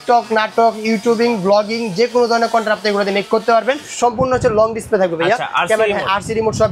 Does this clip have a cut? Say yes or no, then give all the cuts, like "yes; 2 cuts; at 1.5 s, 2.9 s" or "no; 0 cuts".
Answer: yes; 1 cut; at 3.9 s